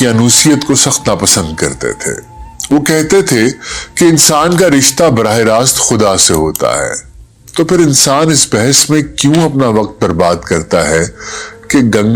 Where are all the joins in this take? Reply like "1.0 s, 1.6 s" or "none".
none